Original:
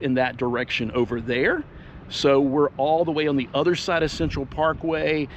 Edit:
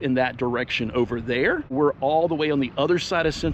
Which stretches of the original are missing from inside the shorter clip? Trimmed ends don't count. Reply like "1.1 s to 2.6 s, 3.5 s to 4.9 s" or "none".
1.7 s to 2.5 s

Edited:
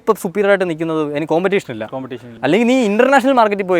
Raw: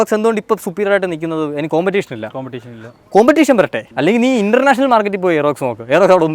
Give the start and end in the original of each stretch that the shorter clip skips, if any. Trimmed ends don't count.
2.7 s to 3.8 s

